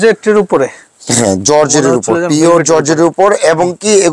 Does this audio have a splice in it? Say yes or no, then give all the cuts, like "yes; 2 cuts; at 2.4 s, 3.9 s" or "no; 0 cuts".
no; 0 cuts